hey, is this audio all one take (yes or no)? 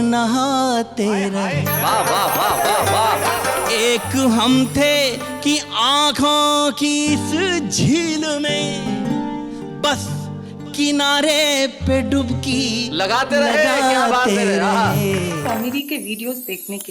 no